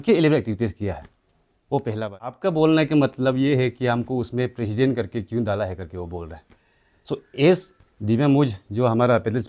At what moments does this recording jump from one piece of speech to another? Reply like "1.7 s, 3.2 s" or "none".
2.4 s